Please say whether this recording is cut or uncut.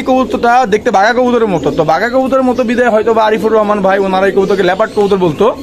uncut